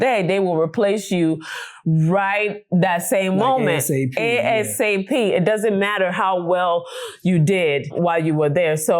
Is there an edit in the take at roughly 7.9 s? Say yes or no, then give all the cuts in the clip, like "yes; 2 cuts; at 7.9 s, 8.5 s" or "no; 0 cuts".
yes; 1 cut; at 7.9 s